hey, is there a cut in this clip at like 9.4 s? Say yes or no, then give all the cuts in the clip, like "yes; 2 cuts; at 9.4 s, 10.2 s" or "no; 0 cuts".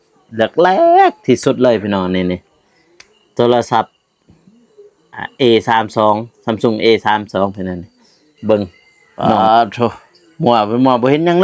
yes; 1 cut; at 9.4 s